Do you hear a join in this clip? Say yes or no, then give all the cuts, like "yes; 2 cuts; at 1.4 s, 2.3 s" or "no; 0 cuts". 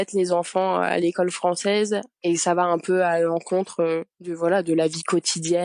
yes; 2 cuts; at 2.1 s, 4.2 s